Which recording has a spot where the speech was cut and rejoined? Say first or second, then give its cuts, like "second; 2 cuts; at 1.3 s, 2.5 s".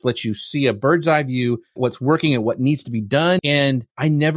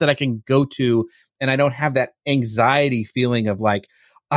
first; 2 cuts; at 1.8 s, 3.4 s